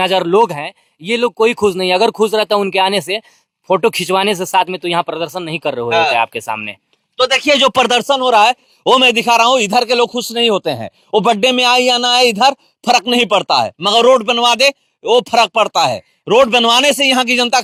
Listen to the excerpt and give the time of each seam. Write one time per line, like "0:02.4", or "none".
none